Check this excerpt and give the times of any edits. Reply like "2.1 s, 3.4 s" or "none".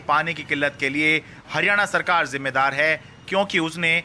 none